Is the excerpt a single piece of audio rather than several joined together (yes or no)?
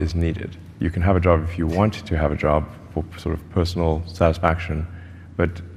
yes